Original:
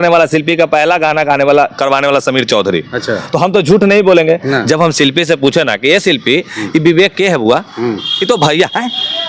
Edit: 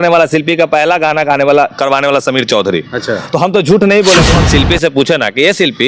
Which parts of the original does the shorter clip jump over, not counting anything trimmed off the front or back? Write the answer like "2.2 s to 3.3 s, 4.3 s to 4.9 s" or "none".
4.4 s to 4.9 s